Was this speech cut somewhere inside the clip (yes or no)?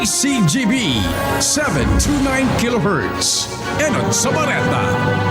no